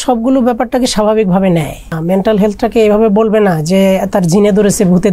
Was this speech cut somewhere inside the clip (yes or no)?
yes